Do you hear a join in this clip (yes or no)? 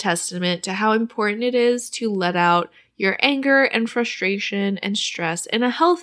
no